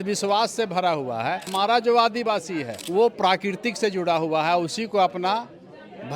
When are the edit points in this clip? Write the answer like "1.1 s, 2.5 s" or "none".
1.5 s, 2.8 s